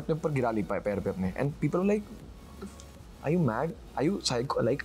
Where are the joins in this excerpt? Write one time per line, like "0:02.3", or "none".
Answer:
none

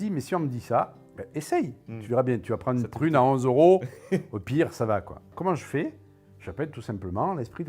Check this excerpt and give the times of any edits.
0:05.3

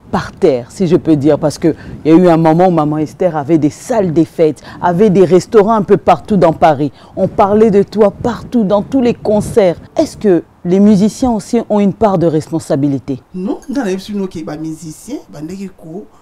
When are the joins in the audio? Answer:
0:09.8
0:13.3

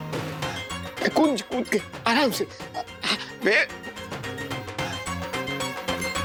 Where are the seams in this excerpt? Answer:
none

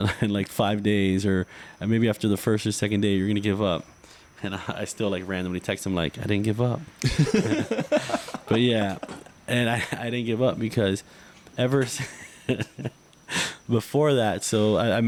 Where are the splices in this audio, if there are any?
none

